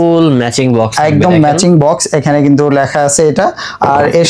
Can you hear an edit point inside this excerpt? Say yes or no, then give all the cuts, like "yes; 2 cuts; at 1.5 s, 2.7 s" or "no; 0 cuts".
no; 0 cuts